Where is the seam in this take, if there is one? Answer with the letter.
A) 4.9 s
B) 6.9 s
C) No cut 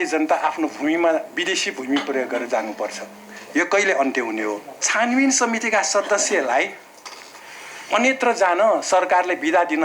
A